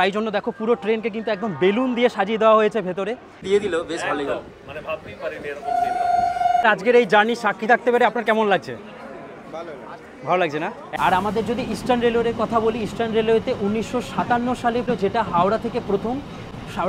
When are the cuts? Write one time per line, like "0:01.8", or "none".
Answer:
0:03.4
0:06.6
0:10.9
0:14.9